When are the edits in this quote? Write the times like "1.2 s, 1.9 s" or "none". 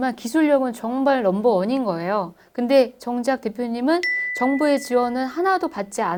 none